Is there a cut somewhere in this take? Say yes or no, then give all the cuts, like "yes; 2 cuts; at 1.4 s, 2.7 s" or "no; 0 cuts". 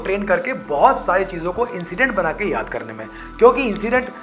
no; 0 cuts